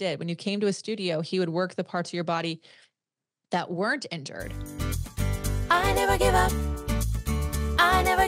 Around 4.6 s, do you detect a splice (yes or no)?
yes